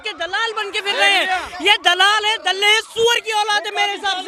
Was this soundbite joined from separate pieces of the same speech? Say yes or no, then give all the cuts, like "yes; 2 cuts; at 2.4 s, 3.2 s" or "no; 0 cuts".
no; 0 cuts